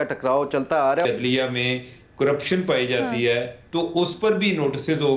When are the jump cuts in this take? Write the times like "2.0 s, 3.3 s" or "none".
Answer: 1.1 s